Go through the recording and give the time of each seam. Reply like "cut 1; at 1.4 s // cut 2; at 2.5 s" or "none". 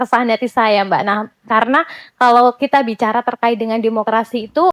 none

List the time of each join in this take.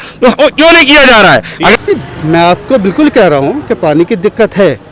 cut 1; at 1.7 s

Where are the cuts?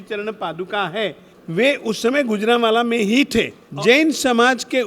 cut 1; at 3.6 s

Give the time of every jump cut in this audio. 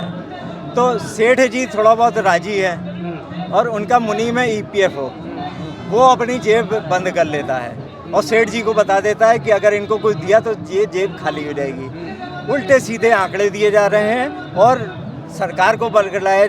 none

